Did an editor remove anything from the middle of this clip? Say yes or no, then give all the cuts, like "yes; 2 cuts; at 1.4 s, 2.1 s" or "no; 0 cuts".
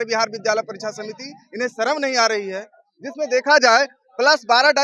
no; 0 cuts